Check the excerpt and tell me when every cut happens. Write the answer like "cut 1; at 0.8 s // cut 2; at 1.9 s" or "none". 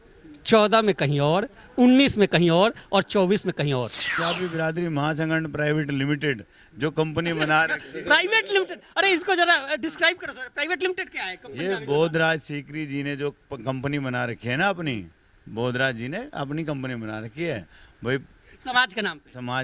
cut 1; at 4.1 s

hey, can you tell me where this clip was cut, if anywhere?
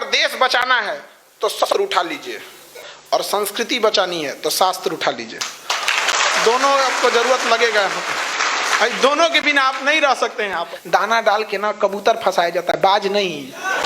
cut 1; at 1.6 s // cut 2; at 10.7 s

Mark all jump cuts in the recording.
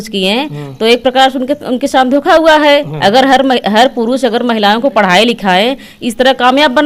none

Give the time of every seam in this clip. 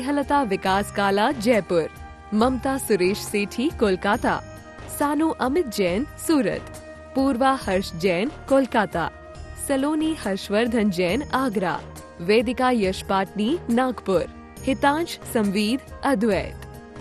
none

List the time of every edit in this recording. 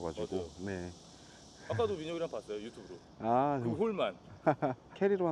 none

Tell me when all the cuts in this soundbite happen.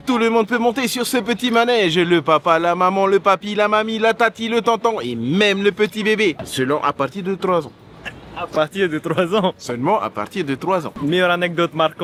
none

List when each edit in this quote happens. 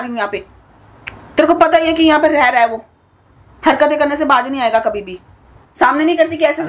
cut 1; at 5.6 s

